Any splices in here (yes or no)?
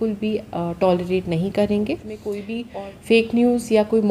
yes